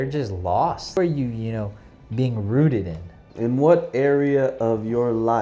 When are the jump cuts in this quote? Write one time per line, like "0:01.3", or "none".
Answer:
0:01.0
0:03.2